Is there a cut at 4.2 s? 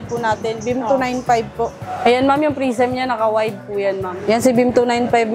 yes; 2 cuts; at 1.8 s, 4.2 s

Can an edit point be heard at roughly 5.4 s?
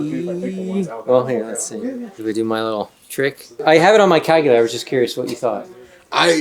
no; 2 cuts; at 2.1 s, 3.6 s

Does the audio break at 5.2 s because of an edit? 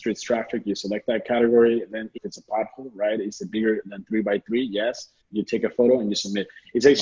yes; 2 cuts; at 2.2 s, 5.2 s

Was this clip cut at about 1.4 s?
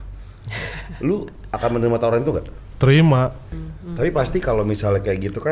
no; 1 cut; at 3.5 s

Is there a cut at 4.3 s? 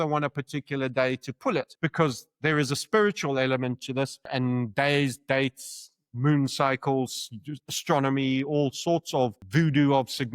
yes; 3 cuts; at 1.7 s, 4.3 s, 9.4 s

